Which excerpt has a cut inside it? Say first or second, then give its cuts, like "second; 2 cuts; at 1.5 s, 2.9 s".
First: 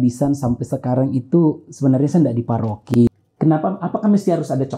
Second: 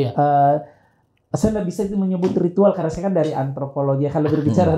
first; 1 cut; at 3.0 s